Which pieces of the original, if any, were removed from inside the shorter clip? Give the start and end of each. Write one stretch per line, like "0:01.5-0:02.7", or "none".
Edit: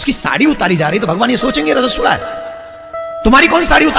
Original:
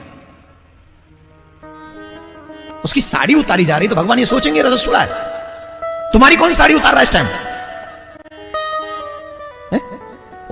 none